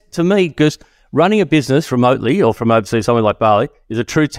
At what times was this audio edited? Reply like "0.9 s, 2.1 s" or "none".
2.6 s